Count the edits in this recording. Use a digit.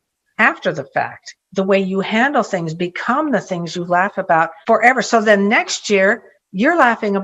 1